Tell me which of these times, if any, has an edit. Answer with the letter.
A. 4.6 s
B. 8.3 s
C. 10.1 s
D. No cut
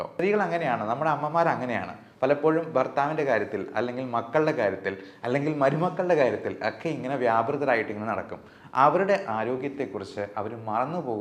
D